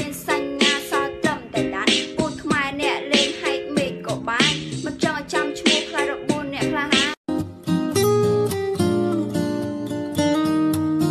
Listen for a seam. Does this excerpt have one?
yes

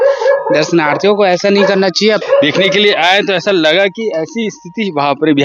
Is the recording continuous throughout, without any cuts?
no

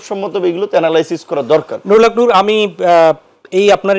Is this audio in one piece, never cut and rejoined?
yes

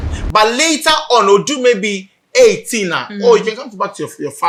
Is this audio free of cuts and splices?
yes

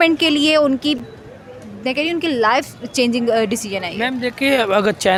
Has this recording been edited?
no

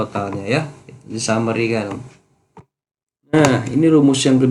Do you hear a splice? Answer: yes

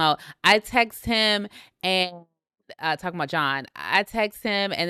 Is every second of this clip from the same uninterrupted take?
yes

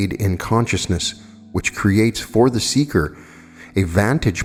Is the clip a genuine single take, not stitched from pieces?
yes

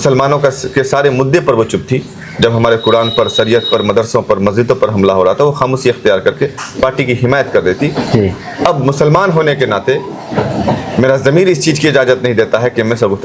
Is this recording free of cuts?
yes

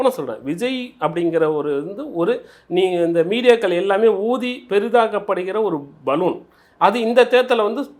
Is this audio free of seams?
yes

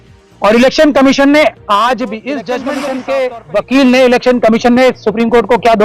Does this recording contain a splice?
yes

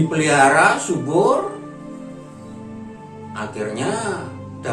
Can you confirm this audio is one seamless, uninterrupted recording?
yes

